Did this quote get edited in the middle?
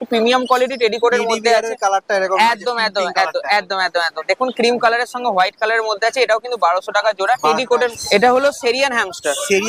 yes; 1 cut; at 7.8 s

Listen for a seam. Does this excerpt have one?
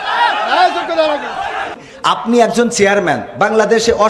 yes; 1 cut; at 1.8 s

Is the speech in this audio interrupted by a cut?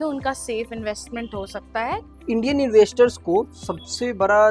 yes; 1 cut; at 2.1 s

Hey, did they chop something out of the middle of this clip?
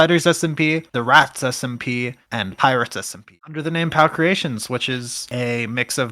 yes; 1 cut; at 3.2 s

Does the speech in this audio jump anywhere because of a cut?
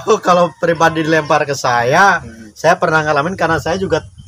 no; 0 cuts

